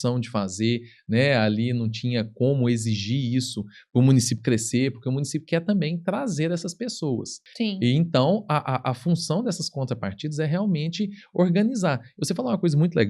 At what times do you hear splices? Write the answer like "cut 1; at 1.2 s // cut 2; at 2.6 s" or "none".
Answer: cut 1; at 7.4 s

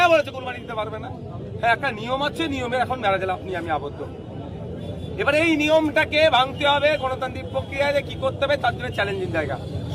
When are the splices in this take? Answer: none

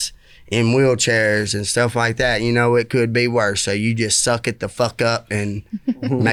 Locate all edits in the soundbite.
none

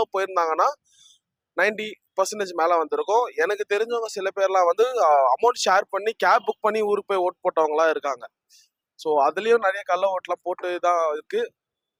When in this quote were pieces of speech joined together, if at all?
none

